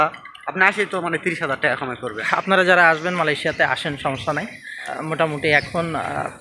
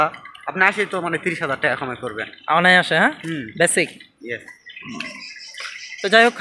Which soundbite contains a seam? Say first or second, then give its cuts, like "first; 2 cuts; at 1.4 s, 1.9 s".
first; 2 cuts; at 2.2 s, 4.9 s